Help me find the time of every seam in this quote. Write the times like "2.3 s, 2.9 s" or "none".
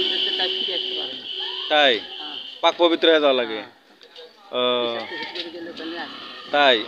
none